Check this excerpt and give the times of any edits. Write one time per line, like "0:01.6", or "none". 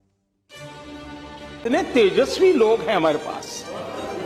0:01.5